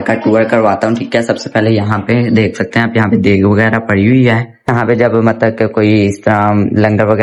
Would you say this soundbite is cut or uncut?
uncut